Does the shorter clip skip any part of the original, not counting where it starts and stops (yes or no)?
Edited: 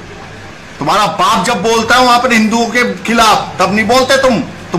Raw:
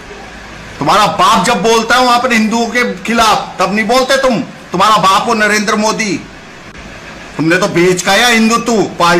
no